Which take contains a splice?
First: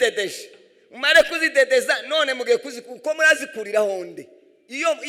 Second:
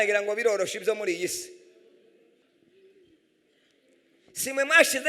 second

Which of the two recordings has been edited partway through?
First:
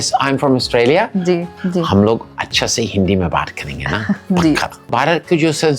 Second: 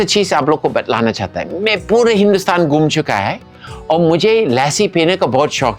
first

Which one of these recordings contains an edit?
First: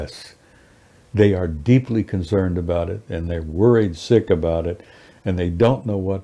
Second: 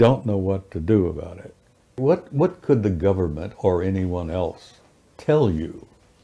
second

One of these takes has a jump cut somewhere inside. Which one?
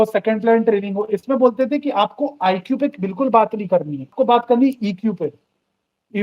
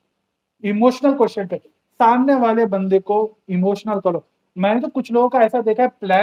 first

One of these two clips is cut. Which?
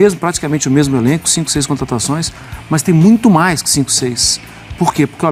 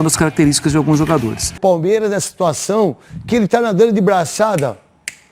second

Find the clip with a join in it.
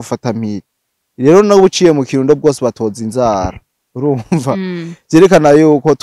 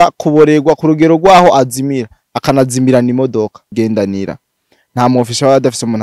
second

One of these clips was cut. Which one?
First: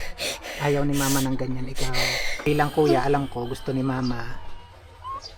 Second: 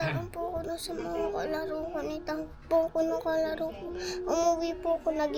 first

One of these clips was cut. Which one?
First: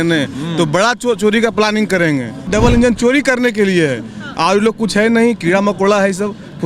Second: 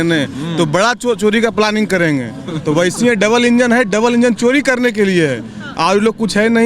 first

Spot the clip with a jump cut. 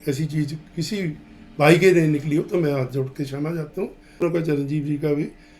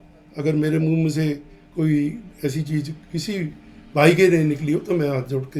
first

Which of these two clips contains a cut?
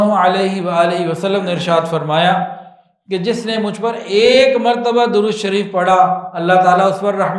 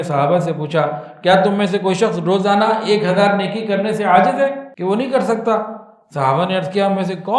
second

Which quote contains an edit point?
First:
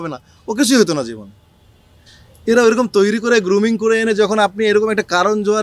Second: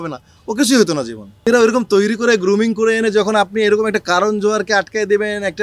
second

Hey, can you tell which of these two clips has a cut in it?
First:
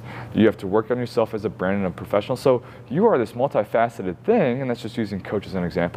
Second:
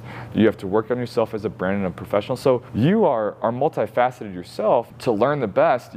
second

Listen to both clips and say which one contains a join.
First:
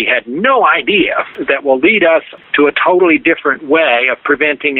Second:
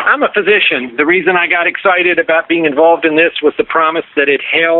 first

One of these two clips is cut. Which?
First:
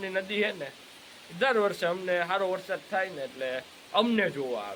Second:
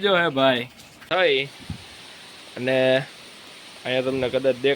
second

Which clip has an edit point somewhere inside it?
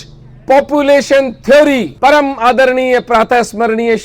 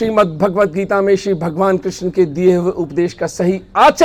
first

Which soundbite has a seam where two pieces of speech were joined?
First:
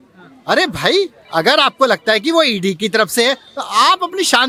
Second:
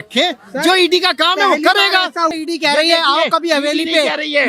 second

